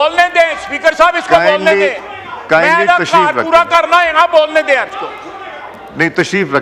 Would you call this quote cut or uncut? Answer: uncut